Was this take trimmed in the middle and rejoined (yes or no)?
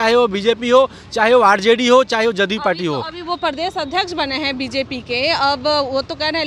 no